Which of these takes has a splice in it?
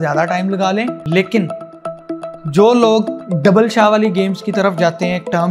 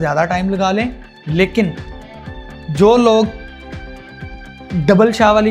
first; 2 cuts; at 1.0 s, 3.2 s

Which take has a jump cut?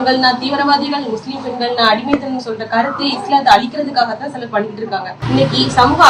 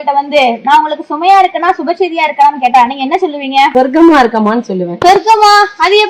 second; 2 cuts; at 3.7 s, 4.8 s

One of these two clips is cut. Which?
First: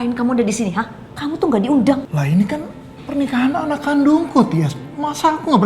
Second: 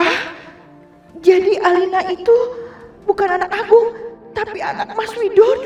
first; 2 cuts; at 1.0 s, 2.1 s

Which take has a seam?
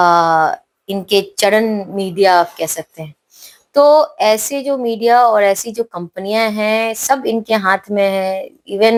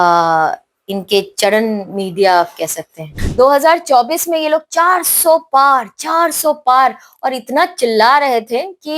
second; 1 cut; at 3.2 s

